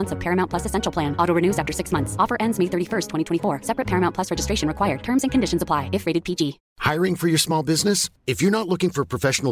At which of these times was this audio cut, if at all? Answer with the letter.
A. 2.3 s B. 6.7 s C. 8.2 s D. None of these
B